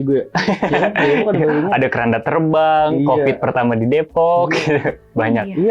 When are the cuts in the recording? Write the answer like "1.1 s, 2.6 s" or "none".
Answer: none